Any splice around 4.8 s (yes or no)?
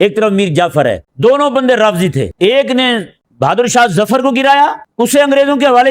yes